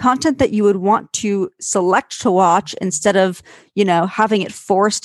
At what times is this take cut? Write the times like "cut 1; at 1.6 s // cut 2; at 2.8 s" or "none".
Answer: none

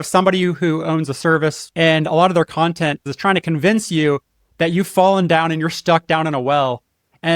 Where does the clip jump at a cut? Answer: cut 1; at 1.6 s // cut 2; at 3.1 s

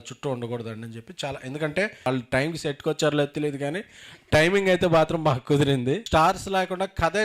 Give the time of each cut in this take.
cut 1; at 2.1 s // cut 2; at 6.0 s

